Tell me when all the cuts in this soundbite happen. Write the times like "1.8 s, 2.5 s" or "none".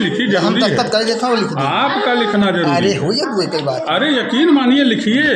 none